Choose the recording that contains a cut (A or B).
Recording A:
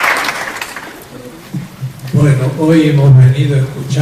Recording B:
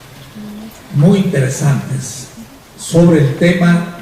B